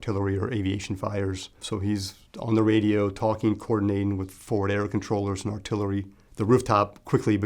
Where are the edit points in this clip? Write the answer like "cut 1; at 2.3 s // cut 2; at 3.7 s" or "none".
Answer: cut 1; at 1.6 s // cut 2; at 6.2 s